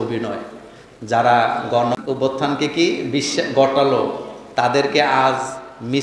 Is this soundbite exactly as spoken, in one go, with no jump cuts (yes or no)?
no